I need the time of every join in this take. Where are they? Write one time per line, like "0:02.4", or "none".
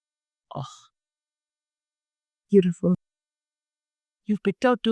none

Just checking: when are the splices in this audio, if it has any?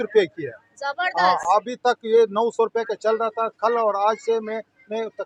none

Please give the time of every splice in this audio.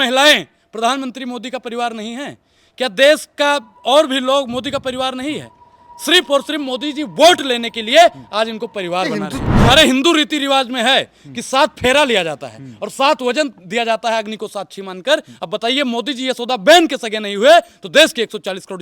0:09.5

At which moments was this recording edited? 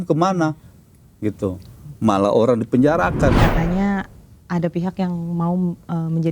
0:03.4

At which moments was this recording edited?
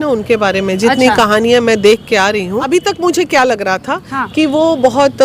0:02.6

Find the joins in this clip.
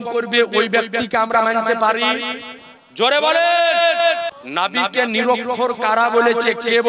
0:04.4

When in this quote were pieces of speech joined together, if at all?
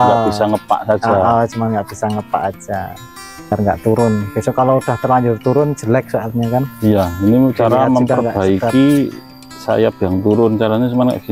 0:03.5

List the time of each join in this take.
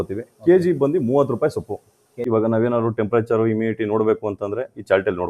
0:02.2

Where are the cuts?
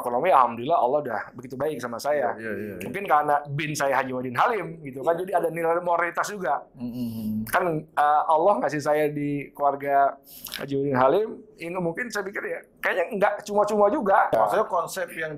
0:14.3

